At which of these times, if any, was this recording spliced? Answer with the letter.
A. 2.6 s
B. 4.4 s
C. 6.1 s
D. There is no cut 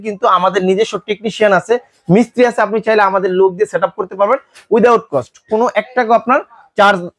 D